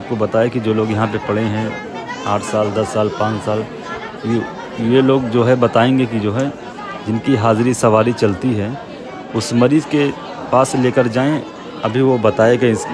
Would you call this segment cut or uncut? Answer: uncut